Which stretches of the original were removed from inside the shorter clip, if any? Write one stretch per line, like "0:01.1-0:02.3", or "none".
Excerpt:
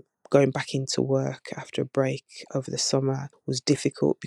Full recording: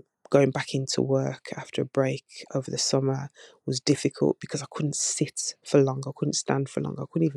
0:03.3-0:03.5